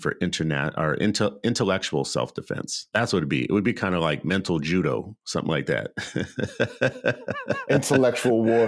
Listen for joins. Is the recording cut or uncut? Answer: cut